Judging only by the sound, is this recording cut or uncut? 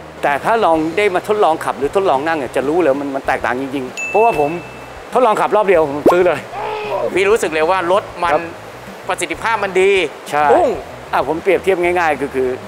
uncut